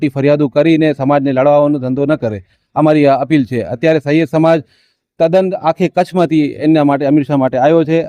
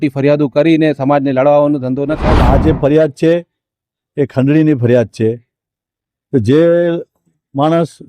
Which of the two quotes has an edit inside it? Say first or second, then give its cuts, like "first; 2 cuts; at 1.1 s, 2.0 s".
second; 1 cut; at 2.3 s